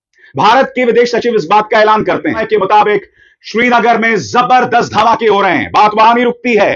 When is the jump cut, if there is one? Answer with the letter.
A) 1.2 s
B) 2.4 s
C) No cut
B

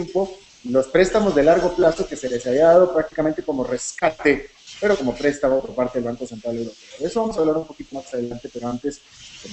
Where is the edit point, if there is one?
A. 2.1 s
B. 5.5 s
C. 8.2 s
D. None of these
A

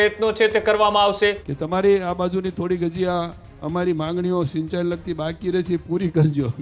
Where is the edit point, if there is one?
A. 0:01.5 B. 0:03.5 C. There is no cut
A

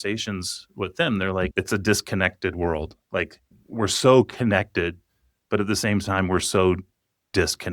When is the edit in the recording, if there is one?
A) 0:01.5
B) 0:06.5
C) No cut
A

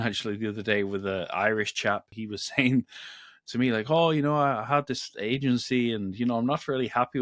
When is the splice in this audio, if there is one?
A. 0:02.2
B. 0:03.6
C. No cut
A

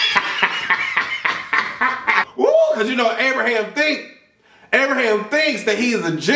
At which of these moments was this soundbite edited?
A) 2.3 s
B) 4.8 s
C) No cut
A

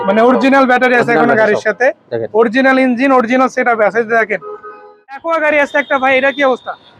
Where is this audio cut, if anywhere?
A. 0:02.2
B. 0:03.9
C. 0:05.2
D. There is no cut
C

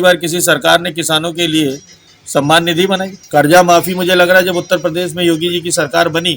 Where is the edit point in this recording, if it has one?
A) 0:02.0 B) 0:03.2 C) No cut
B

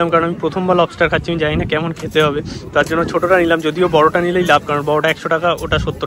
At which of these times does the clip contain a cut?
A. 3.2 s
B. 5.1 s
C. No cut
C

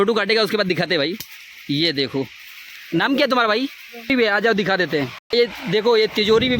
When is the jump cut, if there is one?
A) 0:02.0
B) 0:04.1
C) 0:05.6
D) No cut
B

